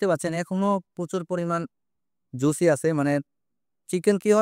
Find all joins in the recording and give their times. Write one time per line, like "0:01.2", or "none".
none